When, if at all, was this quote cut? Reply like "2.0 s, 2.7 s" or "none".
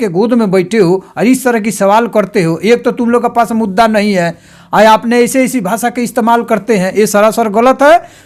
none